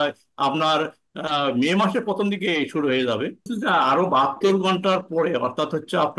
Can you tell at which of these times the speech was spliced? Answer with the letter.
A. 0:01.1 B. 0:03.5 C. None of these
B